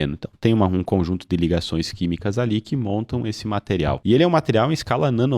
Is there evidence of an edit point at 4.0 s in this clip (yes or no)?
yes